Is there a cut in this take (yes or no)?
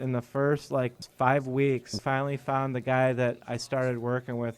yes